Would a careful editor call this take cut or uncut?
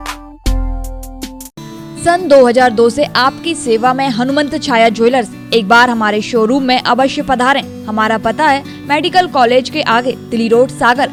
uncut